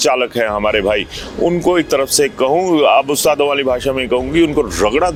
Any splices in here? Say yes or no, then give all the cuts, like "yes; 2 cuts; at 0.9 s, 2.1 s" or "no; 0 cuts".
no; 0 cuts